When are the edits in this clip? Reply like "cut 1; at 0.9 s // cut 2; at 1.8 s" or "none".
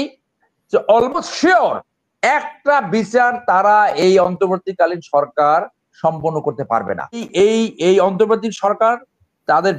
cut 1; at 7.3 s

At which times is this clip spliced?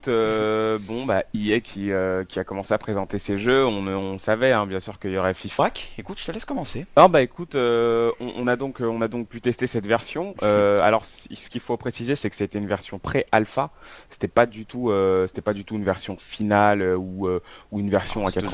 none

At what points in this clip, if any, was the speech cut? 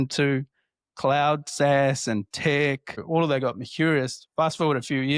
cut 1; at 3.0 s

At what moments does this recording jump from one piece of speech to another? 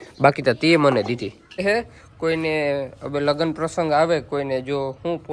cut 1; at 1.6 s

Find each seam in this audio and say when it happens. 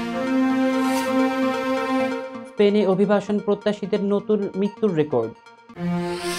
none

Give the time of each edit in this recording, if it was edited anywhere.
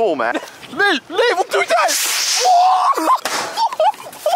cut 1; at 3.3 s

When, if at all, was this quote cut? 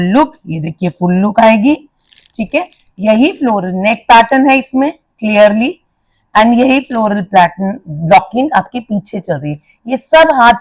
none

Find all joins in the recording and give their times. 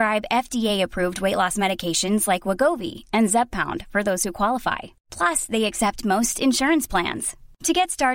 none

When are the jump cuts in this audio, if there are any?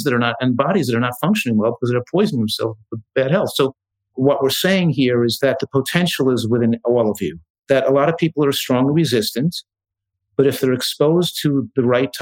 cut 1; at 3.0 s // cut 2; at 4.1 s // cut 3; at 5.4 s // cut 4; at 7.5 s

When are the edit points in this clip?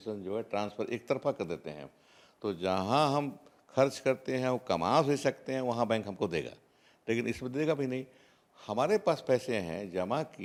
none

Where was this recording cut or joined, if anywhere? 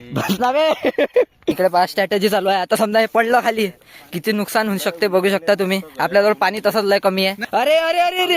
cut 1; at 1.5 s // cut 2; at 7.4 s

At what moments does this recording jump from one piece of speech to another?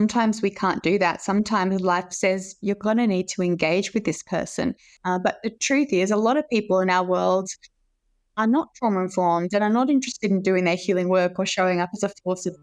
cut 1; at 4.9 s

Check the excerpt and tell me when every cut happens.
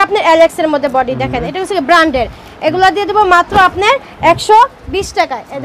none

